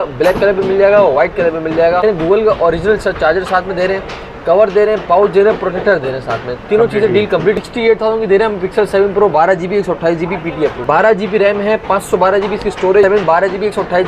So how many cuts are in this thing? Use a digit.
4